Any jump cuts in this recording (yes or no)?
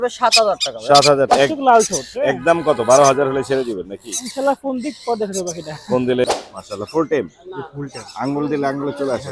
yes